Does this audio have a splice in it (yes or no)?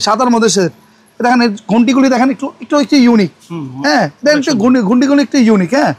no